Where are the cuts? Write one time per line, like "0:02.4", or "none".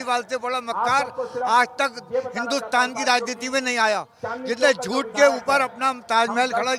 none